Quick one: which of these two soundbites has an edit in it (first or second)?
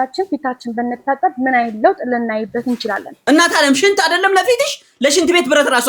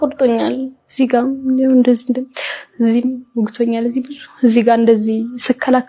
first